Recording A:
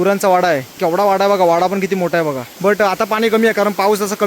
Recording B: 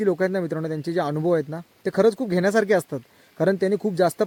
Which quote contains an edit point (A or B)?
A